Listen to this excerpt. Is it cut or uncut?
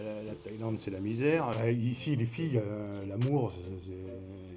cut